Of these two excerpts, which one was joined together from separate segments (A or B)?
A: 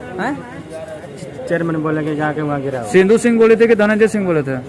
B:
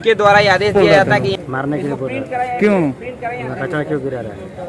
B